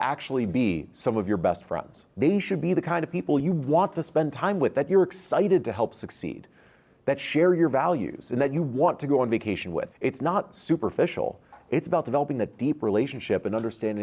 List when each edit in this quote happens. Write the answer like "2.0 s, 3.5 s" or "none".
2.0 s, 9.9 s